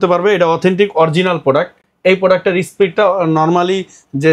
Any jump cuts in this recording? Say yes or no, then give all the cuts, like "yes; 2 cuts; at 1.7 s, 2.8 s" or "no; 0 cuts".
no; 0 cuts